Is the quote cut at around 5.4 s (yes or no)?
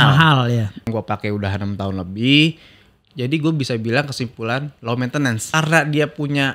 yes